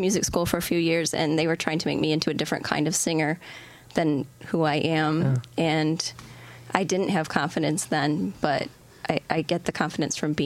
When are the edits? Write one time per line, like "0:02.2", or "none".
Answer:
none